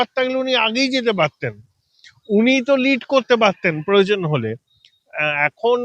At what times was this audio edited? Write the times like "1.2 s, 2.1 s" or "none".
none